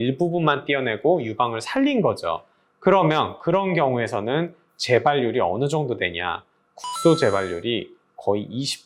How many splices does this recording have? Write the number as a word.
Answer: zero